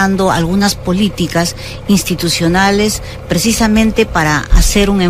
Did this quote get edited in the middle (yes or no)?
no